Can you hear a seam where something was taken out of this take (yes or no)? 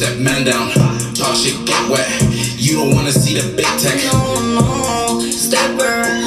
no